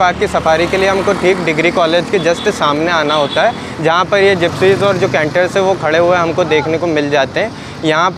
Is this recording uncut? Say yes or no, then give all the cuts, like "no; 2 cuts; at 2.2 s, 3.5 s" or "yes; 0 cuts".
yes; 0 cuts